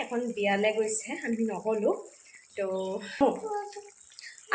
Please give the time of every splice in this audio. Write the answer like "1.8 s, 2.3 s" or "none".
3.2 s